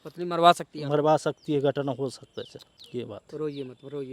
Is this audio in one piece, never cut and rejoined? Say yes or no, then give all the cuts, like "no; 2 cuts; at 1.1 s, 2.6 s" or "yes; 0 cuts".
yes; 0 cuts